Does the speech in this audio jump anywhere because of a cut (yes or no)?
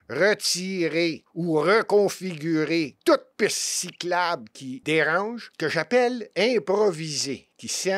yes